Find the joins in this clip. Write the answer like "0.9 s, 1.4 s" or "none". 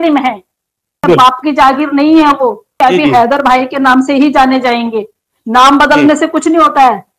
1.0 s, 2.7 s